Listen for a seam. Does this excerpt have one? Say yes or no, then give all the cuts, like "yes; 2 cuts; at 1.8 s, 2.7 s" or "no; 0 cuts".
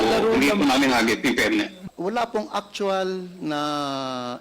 yes; 1 cut; at 1.8 s